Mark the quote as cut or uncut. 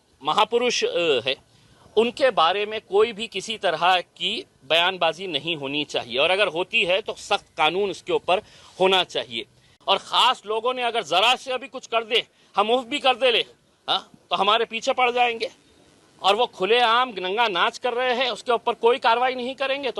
cut